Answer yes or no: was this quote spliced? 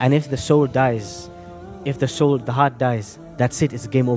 no